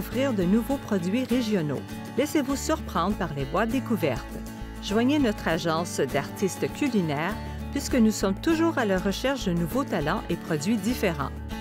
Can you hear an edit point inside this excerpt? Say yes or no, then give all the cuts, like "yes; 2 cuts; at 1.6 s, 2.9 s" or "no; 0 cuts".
no; 0 cuts